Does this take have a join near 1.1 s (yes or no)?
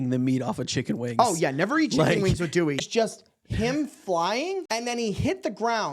no